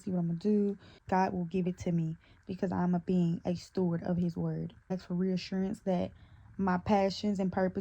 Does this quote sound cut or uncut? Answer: cut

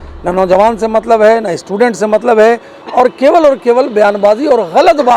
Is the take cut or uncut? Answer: uncut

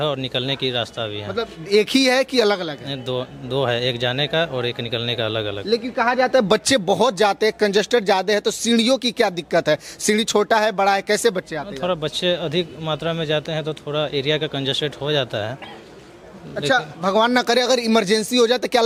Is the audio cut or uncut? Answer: uncut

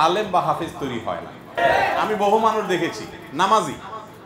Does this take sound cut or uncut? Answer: cut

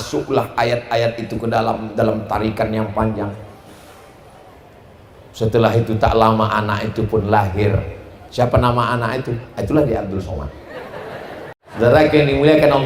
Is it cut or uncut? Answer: cut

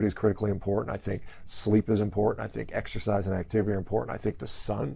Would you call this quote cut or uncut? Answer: uncut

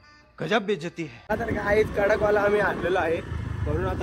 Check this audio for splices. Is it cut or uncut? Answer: cut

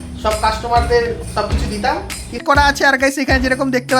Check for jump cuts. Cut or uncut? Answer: cut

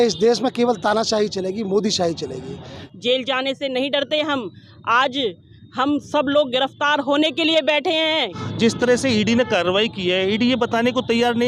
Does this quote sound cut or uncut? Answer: cut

